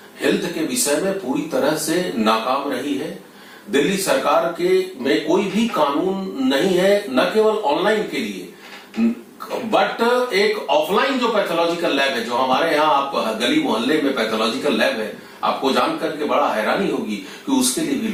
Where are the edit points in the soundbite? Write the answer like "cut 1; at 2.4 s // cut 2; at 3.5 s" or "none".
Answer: none